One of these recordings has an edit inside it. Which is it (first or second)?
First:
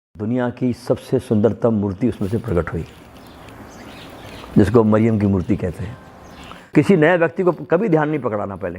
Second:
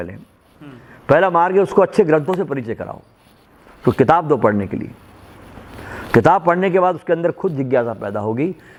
first